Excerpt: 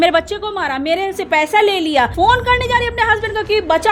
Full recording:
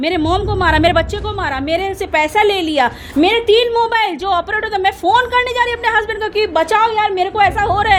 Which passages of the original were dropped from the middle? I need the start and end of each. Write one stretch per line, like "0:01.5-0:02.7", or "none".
0:02.9-0:05.0